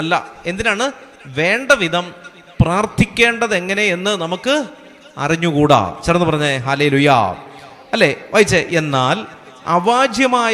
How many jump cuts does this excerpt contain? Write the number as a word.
zero